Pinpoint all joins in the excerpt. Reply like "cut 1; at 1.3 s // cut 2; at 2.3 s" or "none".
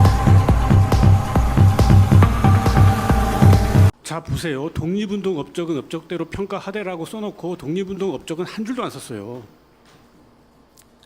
cut 1; at 3.9 s